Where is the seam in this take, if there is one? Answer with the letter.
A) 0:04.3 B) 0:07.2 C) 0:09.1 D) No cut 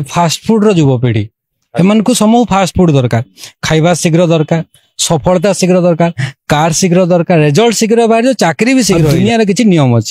C